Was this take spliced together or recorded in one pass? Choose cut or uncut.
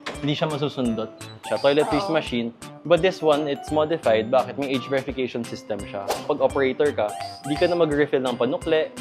cut